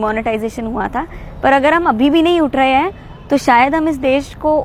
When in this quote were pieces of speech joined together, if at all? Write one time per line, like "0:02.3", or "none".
none